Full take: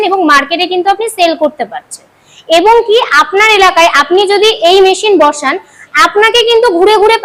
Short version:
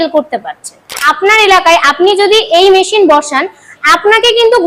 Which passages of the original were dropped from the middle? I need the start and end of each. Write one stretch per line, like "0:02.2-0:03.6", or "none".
0:02.3-0:03.2